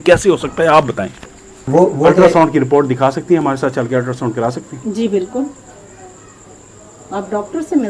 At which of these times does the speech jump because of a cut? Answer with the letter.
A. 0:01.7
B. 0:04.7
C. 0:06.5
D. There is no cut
A